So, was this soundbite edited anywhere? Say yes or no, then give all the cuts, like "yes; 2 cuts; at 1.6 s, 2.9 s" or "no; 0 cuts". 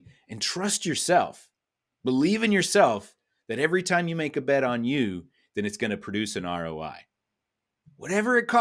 no; 0 cuts